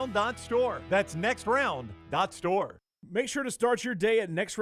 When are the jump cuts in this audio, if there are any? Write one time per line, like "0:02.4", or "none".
0:02.8